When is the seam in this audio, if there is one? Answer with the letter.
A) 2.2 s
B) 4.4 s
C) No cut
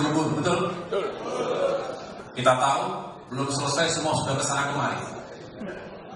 A